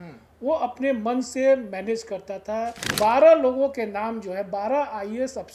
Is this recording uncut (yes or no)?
no